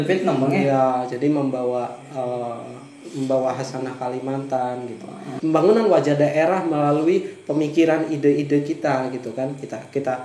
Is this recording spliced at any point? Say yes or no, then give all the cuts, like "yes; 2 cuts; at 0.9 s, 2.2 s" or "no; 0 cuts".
yes; 1 cut; at 5.3 s